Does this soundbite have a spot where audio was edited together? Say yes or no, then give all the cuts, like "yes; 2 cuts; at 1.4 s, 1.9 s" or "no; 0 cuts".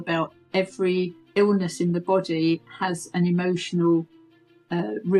no; 0 cuts